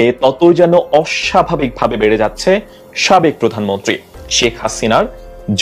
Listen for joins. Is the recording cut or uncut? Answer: uncut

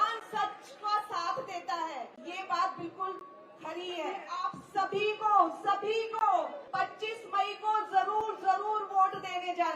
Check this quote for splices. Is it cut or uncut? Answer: cut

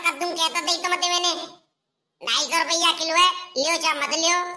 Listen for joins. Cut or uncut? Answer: uncut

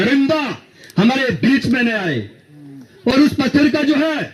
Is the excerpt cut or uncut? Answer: uncut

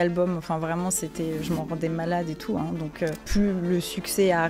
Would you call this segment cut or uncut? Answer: cut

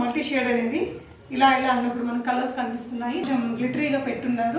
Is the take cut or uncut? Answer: cut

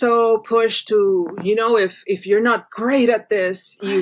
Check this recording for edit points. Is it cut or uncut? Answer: uncut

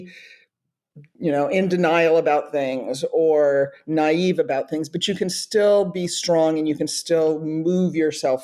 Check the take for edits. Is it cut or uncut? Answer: uncut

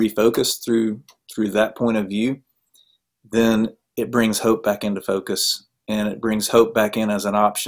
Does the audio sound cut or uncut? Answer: uncut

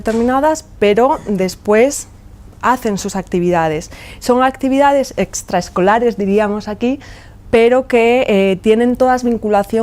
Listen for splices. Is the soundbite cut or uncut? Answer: cut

